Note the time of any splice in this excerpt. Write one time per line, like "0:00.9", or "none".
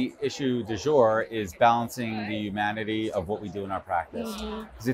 none